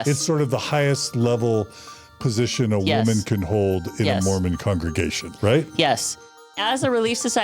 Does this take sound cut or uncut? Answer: cut